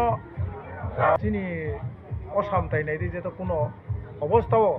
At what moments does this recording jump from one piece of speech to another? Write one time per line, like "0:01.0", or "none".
0:01.2